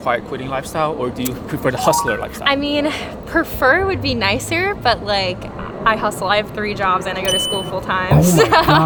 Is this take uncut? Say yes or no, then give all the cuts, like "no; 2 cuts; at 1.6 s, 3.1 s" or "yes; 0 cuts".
yes; 0 cuts